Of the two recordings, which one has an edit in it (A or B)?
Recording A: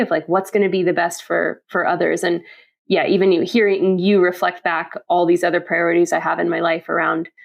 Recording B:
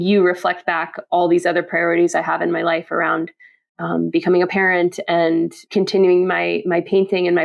B